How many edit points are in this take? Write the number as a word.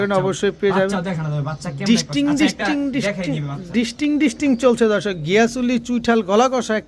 zero